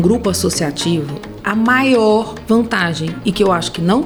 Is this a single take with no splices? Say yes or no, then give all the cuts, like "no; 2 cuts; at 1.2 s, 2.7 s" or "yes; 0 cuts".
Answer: yes; 0 cuts